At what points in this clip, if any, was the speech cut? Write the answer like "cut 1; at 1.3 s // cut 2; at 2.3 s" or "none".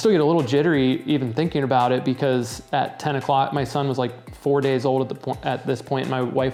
none